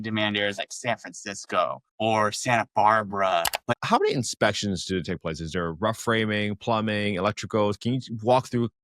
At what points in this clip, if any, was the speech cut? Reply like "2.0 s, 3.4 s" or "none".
1.8 s, 3.6 s